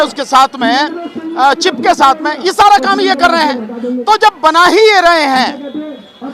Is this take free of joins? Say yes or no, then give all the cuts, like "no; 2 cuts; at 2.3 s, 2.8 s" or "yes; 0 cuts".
yes; 0 cuts